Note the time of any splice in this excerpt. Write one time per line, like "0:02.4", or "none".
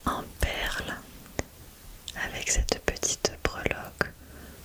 0:01.2